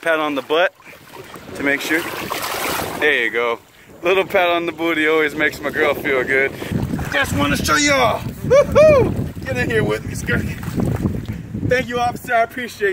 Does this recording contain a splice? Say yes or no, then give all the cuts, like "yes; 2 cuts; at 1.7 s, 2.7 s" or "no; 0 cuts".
yes; 2 cuts; at 6.7 s, 11.4 s